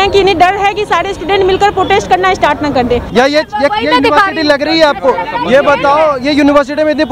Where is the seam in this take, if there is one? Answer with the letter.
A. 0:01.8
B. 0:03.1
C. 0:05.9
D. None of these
B